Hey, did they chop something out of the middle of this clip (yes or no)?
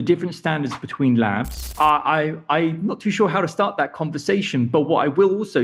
yes